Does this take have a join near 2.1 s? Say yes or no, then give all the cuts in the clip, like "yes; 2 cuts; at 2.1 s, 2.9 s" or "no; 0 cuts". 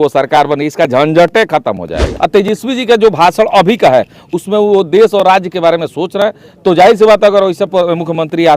yes; 1 cut; at 2.1 s